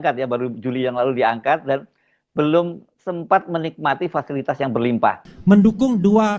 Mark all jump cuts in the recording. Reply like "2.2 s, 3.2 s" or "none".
5.2 s